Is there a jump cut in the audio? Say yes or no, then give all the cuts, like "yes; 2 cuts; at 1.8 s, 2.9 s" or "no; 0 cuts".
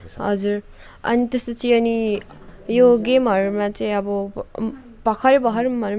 no; 0 cuts